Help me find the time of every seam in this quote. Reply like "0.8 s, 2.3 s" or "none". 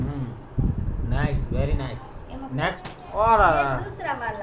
2.8 s